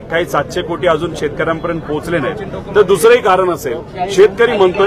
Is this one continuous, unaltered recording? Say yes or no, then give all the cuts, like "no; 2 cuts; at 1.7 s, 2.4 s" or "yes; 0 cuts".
yes; 0 cuts